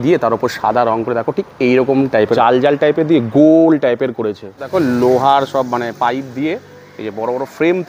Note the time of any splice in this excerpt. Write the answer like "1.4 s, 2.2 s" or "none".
2.3 s, 4.6 s